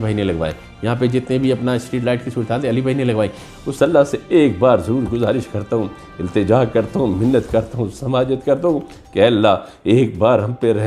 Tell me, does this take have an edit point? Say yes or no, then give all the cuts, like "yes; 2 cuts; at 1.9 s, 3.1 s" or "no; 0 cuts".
yes; 1 cut; at 3.5 s